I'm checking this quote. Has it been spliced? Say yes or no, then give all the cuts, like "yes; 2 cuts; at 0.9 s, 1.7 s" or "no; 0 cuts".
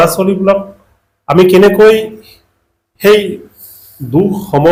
no; 0 cuts